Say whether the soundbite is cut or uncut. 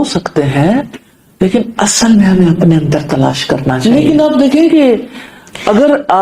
cut